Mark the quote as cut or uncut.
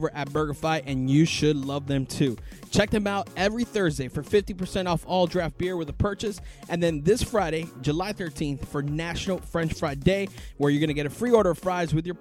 uncut